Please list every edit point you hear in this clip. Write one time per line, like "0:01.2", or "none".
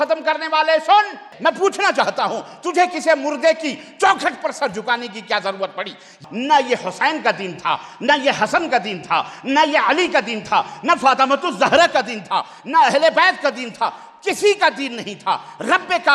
0:01.3
0:06.2